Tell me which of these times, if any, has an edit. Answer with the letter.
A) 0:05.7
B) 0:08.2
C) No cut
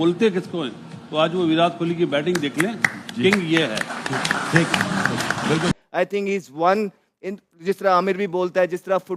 A